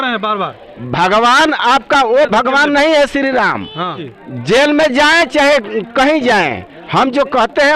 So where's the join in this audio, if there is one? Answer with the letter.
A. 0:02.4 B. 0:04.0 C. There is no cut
B